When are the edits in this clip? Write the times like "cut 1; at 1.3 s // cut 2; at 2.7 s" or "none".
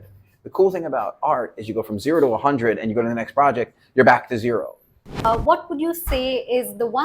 cut 1; at 5.2 s